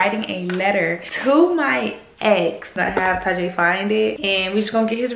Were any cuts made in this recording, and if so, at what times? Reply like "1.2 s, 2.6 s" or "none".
1.1 s, 2.7 s, 4.2 s